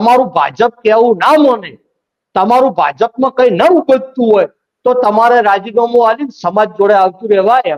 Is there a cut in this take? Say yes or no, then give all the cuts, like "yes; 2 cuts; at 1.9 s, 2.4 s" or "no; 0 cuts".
no; 0 cuts